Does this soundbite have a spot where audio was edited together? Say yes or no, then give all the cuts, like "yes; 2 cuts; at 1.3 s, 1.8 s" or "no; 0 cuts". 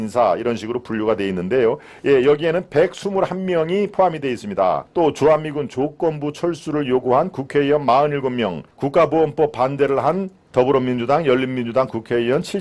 yes; 2 cuts; at 4.8 s, 8.7 s